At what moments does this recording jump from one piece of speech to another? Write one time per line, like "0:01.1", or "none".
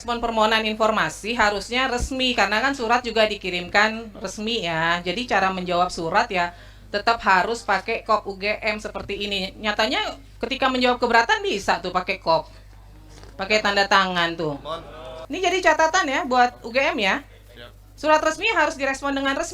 0:15.2